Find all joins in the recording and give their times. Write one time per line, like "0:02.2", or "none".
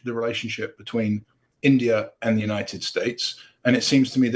none